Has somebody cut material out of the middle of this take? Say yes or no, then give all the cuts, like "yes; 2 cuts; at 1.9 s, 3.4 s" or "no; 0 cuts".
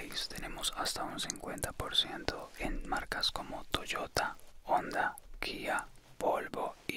no; 0 cuts